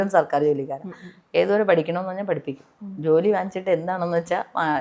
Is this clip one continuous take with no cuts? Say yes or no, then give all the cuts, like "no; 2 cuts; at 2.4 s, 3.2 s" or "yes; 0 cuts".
yes; 0 cuts